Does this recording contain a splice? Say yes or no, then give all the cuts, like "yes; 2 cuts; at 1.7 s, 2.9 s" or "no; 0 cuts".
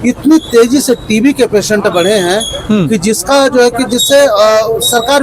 no; 0 cuts